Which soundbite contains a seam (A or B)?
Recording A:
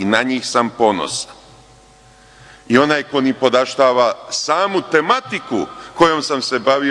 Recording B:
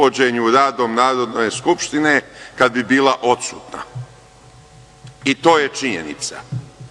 A